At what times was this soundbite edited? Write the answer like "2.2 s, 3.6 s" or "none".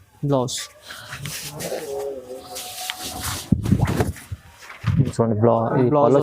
5.1 s